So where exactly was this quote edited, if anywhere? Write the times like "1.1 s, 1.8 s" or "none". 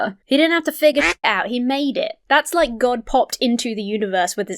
2.2 s

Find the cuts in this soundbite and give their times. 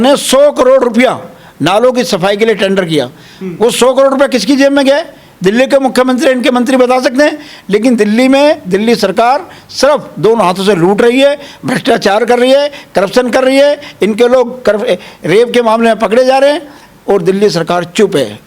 none

